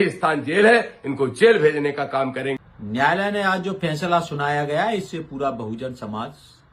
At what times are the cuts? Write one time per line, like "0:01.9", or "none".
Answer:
0:02.7